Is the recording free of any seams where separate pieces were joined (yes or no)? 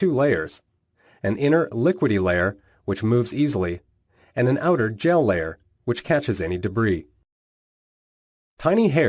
yes